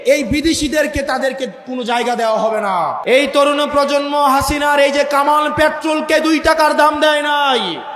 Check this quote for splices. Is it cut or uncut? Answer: cut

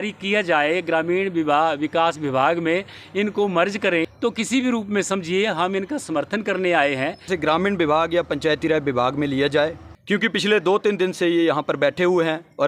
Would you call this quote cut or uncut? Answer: cut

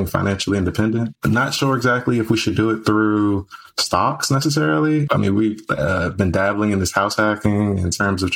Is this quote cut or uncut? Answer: cut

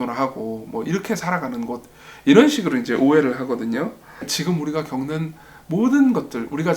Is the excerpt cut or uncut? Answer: cut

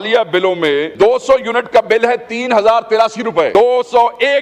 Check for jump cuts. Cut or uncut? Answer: cut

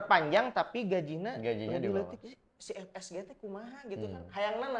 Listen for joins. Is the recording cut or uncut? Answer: uncut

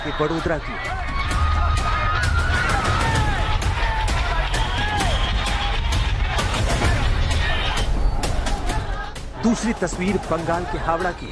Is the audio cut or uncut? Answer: uncut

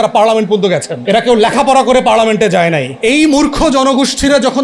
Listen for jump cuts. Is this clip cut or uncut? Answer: cut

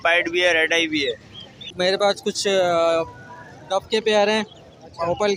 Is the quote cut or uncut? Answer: cut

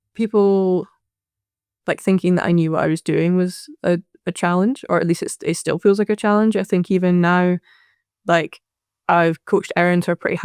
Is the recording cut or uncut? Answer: uncut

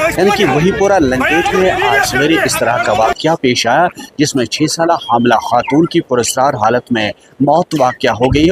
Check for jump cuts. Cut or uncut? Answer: uncut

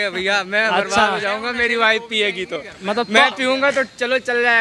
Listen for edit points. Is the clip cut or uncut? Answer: uncut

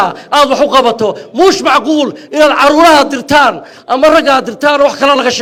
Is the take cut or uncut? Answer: uncut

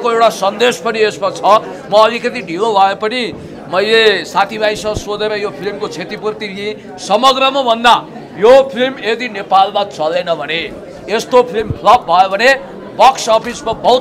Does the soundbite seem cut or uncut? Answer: uncut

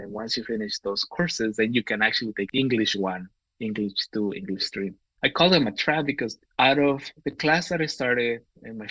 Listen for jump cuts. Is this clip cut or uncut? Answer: cut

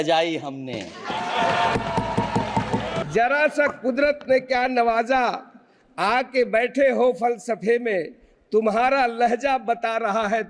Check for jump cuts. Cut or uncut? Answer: cut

